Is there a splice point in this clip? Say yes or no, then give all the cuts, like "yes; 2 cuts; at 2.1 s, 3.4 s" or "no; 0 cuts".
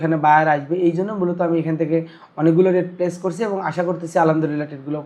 no; 0 cuts